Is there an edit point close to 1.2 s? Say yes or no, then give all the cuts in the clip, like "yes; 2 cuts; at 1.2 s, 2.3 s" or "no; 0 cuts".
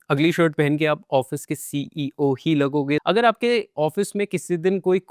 no; 1 cut; at 3.0 s